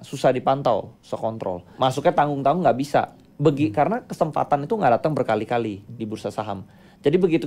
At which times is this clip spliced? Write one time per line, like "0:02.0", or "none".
0:01.6